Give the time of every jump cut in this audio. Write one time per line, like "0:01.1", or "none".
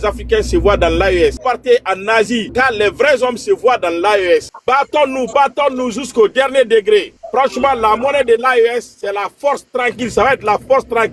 0:01.4
0:02.5
0:04.5